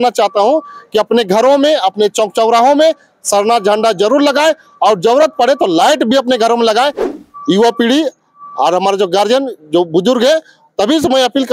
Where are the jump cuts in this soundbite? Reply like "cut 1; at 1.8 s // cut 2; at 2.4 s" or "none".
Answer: cut 1; at 7.1 s